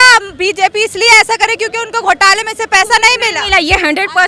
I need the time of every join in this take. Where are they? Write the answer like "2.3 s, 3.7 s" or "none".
none